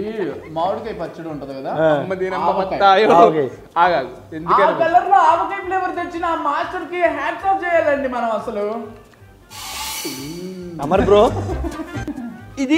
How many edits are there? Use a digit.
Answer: 0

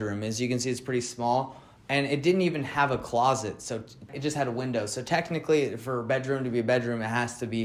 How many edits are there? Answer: 1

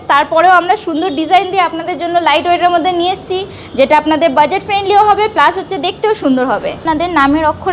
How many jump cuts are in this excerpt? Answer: 1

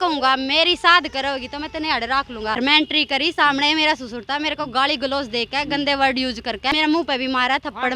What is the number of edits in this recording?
2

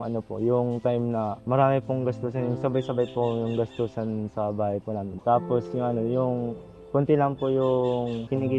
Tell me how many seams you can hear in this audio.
1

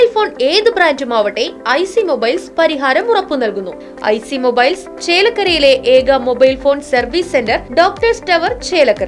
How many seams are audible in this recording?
1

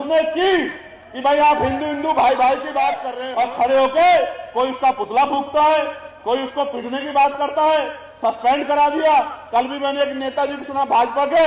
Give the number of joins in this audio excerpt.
1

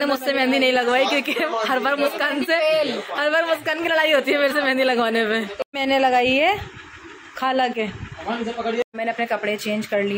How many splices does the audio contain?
2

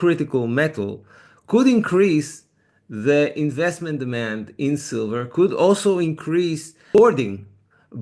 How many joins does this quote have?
1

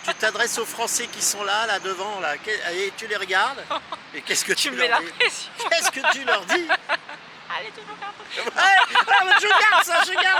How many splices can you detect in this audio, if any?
0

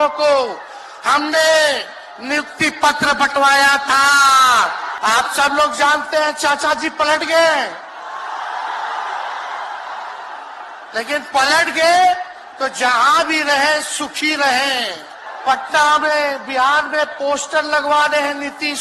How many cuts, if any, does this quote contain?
2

